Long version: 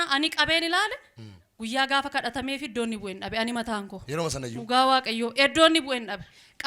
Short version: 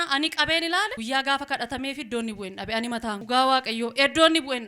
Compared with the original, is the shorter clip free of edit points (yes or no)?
no